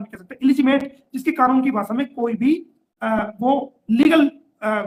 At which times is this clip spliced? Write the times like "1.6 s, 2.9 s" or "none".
none